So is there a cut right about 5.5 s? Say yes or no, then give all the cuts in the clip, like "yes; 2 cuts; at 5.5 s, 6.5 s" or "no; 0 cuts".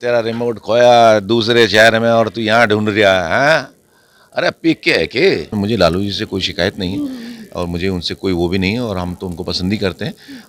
yes; 1 cut; at 5.5 s